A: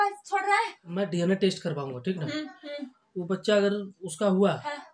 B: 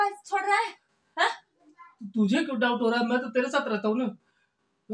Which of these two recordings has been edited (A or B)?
A